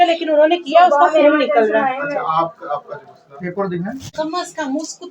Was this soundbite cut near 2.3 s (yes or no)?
no